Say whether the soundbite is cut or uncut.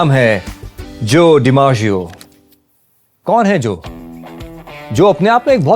uncut